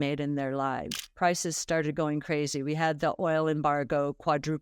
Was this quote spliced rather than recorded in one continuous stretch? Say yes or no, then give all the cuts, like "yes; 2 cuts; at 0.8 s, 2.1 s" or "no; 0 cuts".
yes; 1 cut; at 1.0 s